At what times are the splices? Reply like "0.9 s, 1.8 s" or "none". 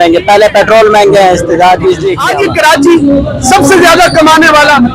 2.2 s